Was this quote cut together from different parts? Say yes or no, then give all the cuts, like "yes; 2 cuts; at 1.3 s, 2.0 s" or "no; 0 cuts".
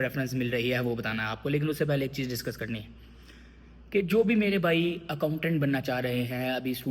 no; 0 cuts